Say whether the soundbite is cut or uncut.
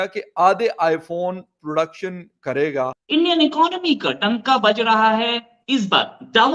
cut